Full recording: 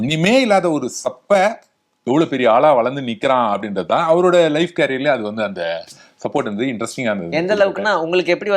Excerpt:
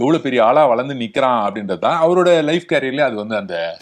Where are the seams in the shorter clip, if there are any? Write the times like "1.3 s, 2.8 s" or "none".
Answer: none